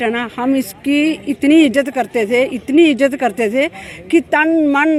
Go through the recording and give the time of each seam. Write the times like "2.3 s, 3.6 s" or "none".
none